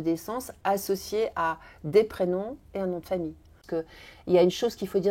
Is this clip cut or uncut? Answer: cut